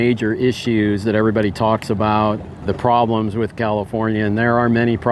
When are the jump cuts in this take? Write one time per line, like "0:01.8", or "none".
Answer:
0:02.6